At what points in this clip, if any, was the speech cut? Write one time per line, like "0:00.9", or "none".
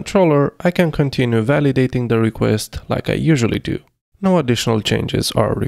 none